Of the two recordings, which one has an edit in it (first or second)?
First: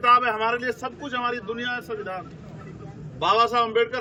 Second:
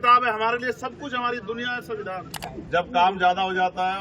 second